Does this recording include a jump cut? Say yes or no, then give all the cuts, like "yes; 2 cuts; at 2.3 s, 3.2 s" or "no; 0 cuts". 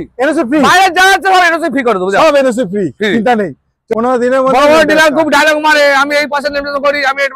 yes; 1 cut; at 3.8 s